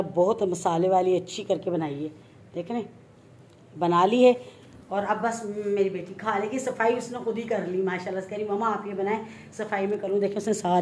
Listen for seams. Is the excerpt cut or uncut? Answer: uncut